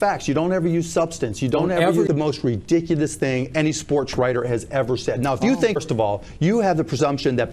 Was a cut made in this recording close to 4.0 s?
no; 2 cuts; at 2.1 s, 5.8 s

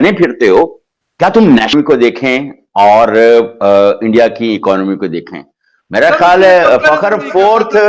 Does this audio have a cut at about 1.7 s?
yes; 1 cut; at 1.7 s

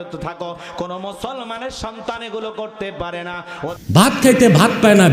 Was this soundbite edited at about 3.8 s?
yes; 1 cut; at 3.8 s

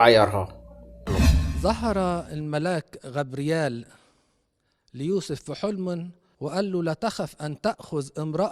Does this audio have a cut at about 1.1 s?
yes; 1 cut; at 1.1 s

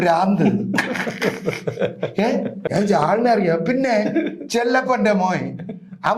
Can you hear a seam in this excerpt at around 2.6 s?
yes; 1 cut; at 2.6 s

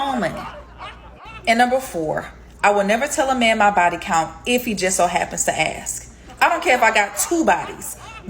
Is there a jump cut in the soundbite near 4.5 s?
no; 2 cuts; at 1.0 s, 5.9 s

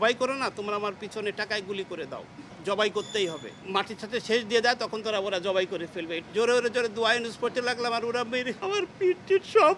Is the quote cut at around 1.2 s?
no; 4 cuts; at 2.5 s, 3.6 s, 6.2 s, 8.6 s

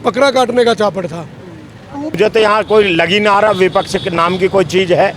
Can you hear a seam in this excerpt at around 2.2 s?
yes; 1 cut; at 2.2 s

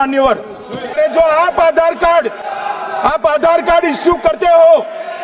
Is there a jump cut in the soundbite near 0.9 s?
yes; 1 cut; at 0.9 s

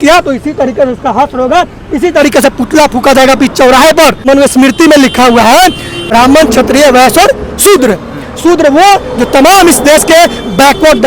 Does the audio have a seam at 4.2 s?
yes; 2 cuts; at 4.2 s, 5.9 s

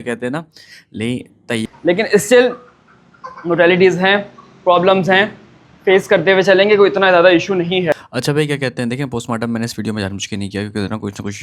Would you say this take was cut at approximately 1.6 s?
yes; 2 cuts; at 1.6 s, 8.1 s

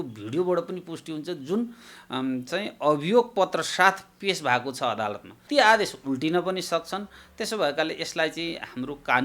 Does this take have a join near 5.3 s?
yes; 1 cut; at 5.3 s

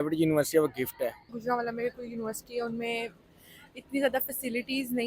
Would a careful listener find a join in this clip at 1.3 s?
yes; 1 cut; at 1.3 s

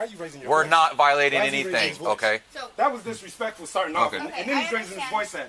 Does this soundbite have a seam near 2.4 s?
yes; 1 cut; at 2.4 s

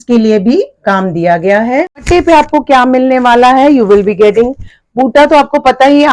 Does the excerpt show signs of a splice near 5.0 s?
no; 1 cut; at 2.0 s

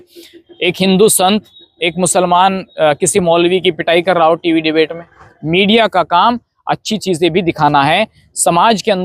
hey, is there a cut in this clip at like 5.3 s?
yes; 1 cut; at 5.3 s

